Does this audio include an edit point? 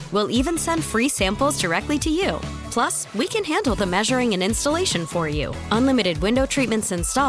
no; 0 cuts

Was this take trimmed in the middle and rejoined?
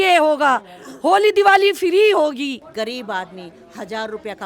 yes; 1 cut; at 2.6 s

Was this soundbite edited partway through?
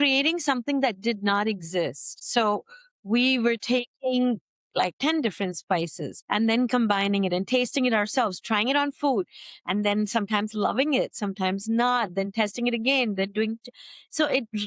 yes; 1 cut; at 5.0 s

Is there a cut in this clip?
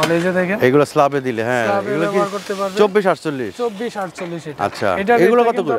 no; 0 cuts

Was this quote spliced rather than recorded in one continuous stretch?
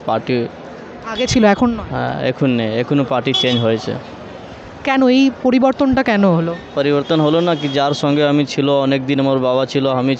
no; 0 cuts

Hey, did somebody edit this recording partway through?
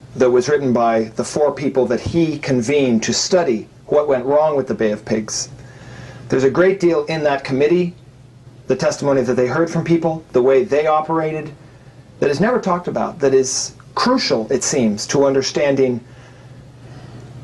no; 0 cuts

